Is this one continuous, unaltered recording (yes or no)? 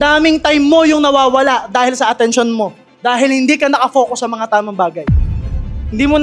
no